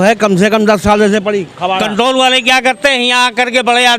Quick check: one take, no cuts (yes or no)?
no